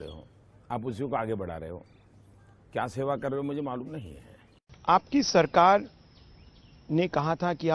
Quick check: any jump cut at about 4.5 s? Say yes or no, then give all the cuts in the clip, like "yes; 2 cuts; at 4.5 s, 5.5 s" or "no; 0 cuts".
yes; 1 cut; at 4.5 s